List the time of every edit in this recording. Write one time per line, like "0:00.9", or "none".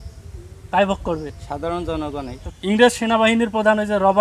0:02.4